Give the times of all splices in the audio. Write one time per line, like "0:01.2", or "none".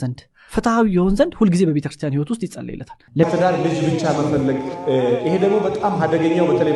0:03.2